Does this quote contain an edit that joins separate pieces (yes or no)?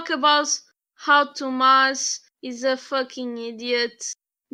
no